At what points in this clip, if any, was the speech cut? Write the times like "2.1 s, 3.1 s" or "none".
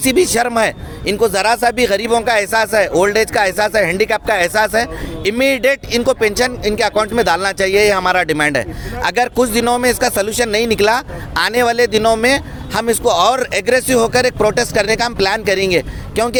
none

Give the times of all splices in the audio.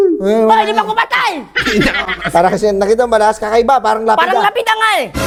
none

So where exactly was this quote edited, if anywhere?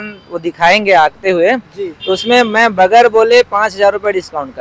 none

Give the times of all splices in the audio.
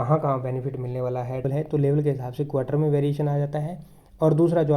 1.5 s

